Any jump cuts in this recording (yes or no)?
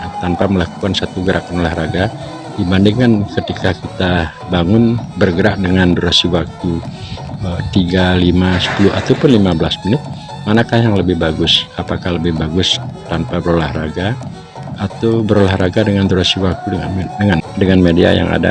yes